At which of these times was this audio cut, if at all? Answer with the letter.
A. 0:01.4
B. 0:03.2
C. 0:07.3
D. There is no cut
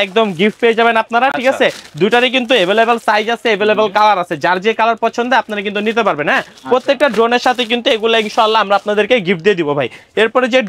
D